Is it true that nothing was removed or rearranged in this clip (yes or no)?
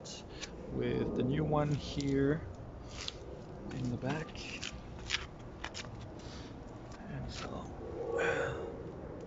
yes